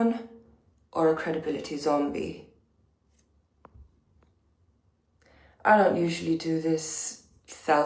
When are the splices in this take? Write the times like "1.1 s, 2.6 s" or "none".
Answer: 1.7 s